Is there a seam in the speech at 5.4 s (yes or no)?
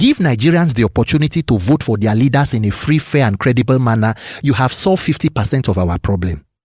no